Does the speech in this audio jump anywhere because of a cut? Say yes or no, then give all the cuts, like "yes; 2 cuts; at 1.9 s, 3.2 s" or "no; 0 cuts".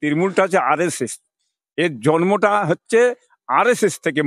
no; 0 cuts